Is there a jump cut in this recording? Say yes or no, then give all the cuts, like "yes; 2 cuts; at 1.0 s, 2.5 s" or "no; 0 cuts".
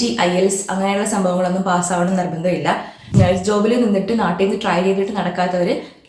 yes; 1 cut; at 3.1 s